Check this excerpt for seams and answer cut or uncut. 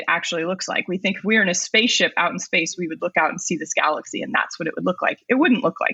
uncut